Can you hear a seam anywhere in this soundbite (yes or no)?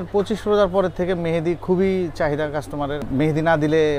yes